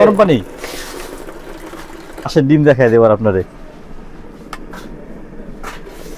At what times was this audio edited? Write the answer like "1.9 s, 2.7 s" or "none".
2.3 s